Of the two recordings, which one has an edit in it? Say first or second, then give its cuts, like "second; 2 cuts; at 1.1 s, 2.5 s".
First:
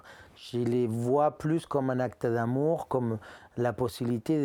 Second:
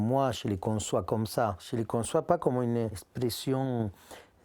second; 2 cuts; at 1.6 s, 3.1 s